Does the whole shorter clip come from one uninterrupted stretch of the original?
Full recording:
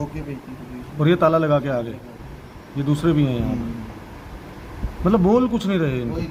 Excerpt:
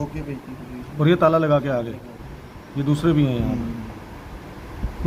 yes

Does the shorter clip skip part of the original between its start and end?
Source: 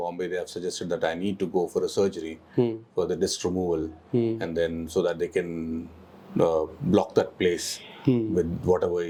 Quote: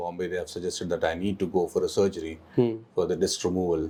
no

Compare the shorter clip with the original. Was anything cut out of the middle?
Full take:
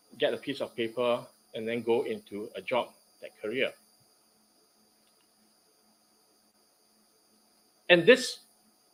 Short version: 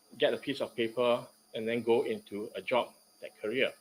no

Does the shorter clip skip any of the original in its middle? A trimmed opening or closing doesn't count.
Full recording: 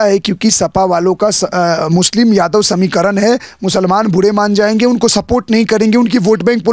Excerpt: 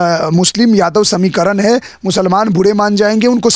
no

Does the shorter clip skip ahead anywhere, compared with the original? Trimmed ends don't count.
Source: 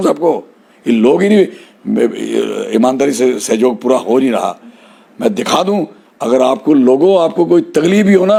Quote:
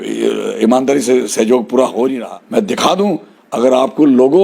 yes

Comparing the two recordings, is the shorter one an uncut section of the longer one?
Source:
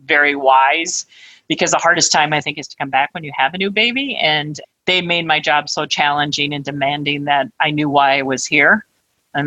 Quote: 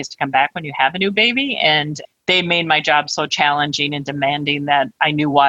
yes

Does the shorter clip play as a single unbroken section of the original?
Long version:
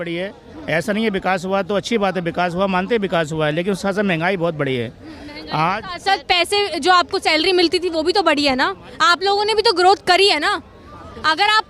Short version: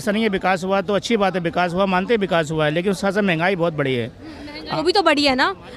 no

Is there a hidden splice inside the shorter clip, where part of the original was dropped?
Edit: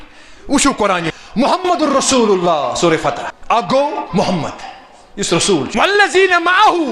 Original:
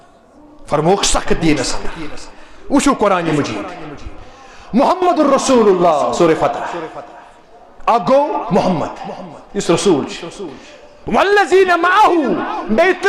yes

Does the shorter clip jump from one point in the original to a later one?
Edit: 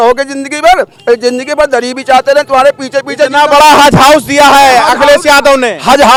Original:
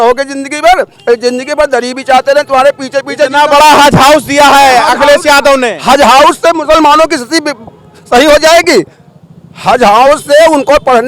no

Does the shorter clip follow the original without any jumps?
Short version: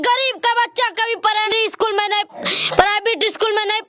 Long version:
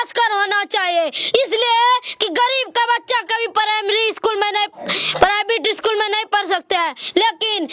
no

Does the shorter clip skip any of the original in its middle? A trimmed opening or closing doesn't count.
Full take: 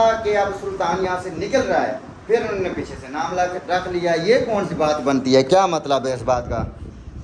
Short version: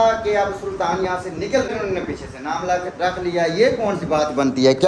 yes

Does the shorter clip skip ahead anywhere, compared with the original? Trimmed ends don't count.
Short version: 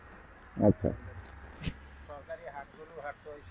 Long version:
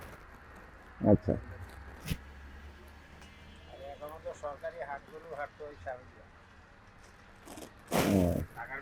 yes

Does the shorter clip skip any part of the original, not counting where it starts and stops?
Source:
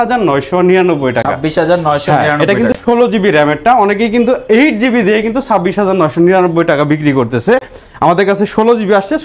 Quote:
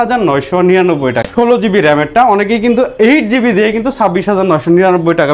yes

